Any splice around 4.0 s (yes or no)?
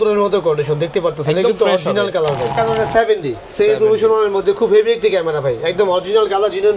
no